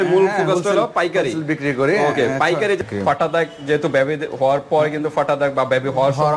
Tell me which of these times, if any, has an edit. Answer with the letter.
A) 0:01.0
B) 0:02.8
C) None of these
B